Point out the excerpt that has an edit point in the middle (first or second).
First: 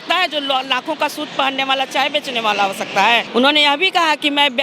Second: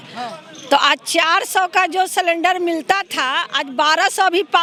first